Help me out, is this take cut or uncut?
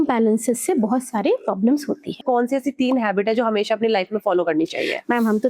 cut